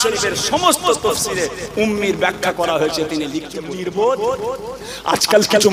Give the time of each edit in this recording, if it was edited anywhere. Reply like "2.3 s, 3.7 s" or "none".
3.6 s

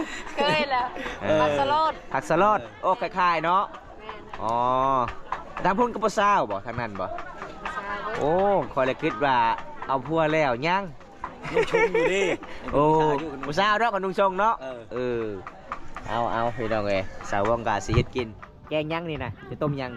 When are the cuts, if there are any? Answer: none

